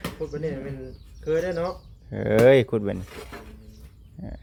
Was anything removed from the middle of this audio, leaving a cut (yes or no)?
no